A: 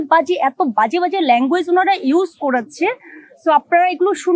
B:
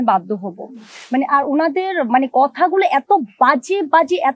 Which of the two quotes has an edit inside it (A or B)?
B